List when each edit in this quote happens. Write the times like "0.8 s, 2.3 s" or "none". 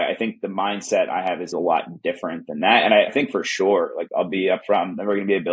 1.5 s